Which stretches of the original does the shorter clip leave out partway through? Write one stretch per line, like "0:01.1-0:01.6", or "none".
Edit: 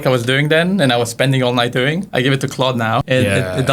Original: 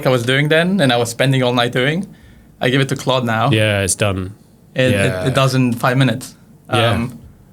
0:02.1-0:02.5
0:03.5-0:04.7